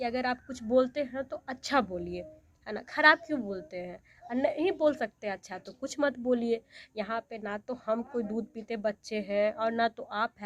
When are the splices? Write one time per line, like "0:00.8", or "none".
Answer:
none